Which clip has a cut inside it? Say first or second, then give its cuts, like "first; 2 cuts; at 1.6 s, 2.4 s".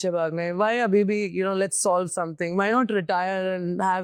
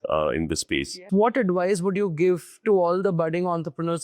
second; 1 cut; at 1.0 s